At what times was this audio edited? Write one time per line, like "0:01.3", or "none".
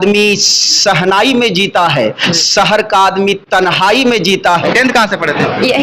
0:04.7